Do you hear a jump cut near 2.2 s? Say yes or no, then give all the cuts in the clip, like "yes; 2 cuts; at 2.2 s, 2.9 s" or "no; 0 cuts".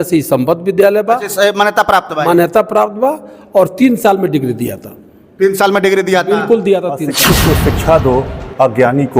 no; 1 cut; at 7.1 s